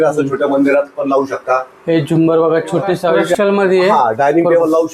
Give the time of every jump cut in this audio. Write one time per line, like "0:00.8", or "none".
0:03.4